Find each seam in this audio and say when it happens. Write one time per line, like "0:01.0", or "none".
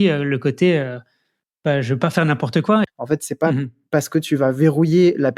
0:02.8

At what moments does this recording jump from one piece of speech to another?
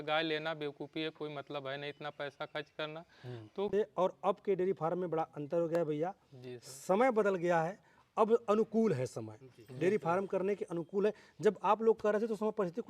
0:03.7

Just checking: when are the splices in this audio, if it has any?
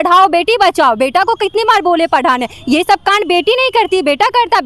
none

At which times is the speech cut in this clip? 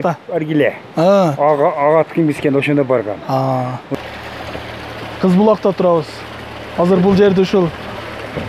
0:03.9

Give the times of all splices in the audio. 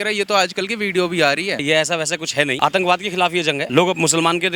0:01.6
0:02.6
0:03.6

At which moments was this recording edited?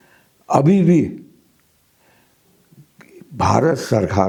none

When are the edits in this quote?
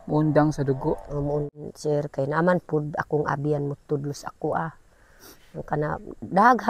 0:01.6

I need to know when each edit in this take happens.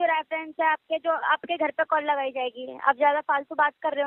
none

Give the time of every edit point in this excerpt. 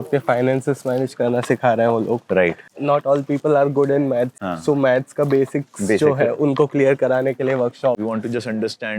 0:08.0

